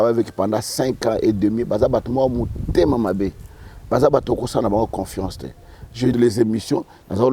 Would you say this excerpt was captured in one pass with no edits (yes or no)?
no